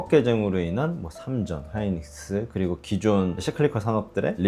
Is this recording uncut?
yes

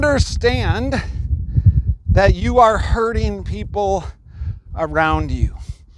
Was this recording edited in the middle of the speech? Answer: no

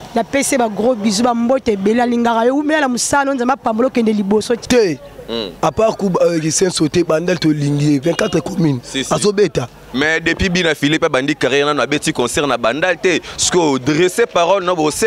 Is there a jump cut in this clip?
yes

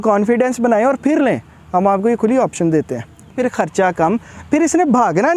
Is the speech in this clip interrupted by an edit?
yes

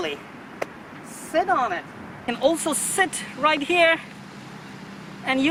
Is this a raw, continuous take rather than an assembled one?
yes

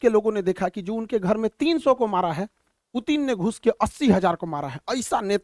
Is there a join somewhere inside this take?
no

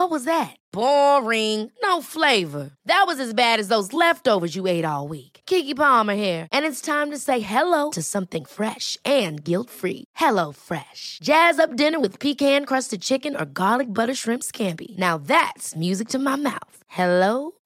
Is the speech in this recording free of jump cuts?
yes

